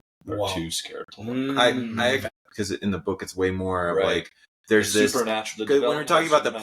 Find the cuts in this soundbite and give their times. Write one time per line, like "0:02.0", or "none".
0:02.2